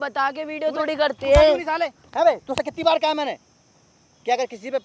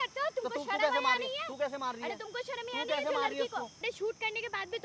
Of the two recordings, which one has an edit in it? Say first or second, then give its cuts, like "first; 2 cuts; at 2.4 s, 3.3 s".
second; 1 cut; at 3.9 s